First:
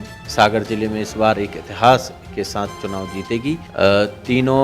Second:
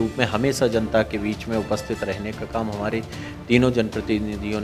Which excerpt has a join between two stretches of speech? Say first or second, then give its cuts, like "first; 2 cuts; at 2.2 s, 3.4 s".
first; 1 cut; at 3.7 s